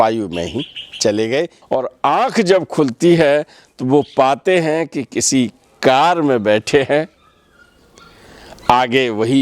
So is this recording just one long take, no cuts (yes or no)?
no